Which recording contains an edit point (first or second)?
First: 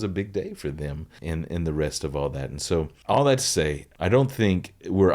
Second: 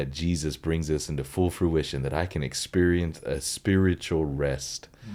first